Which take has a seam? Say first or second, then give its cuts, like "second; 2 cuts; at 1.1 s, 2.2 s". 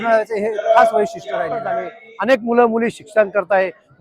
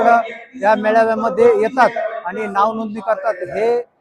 first; 1 cut; at 1.8 s